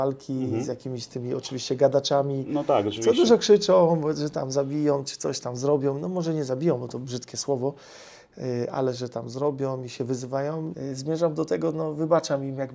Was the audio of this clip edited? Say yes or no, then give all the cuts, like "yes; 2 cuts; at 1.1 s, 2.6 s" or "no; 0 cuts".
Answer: yes; 1 cut; at 10.7 s